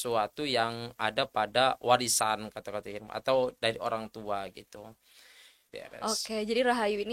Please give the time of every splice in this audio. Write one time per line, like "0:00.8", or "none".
0:05.7